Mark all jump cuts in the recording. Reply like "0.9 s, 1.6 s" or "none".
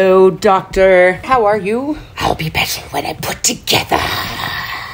1.2 s, 2.1 s